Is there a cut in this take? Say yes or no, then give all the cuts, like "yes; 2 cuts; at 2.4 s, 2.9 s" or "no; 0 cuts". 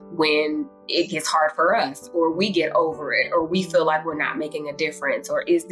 no; 0 cuts